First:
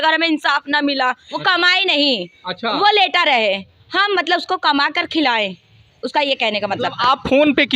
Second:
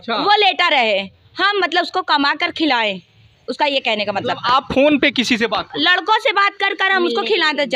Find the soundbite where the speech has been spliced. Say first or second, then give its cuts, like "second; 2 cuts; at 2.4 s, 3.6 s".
first; 1 cut; at 1.3 s